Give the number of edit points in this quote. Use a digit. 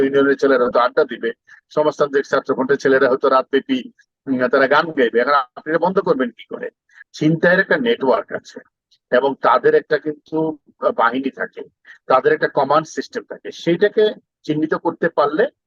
1